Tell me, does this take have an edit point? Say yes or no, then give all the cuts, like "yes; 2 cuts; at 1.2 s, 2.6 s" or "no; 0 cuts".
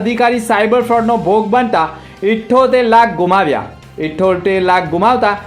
no; 0 cuts